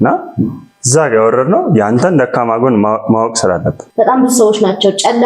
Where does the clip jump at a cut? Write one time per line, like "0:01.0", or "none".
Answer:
0:03.8